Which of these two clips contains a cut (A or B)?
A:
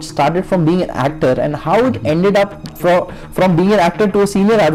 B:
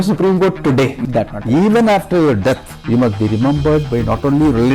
B